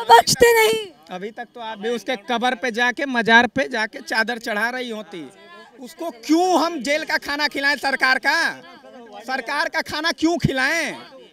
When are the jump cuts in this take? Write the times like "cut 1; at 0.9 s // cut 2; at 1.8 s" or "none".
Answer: none